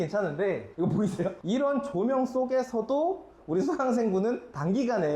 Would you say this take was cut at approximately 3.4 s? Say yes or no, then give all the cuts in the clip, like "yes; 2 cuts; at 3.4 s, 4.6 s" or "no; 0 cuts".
no; 1 cut; at 0.9 s